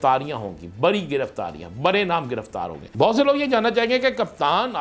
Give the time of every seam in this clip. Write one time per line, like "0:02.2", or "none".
none